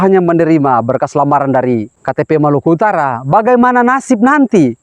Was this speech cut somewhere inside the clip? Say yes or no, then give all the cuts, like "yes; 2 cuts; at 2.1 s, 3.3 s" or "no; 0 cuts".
yes; 1 cut; at 2.0 s